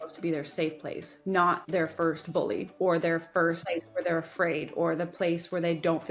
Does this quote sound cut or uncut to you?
cut